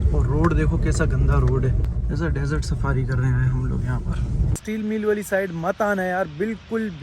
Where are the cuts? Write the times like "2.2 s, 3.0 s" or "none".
1.9 s, 4.6 s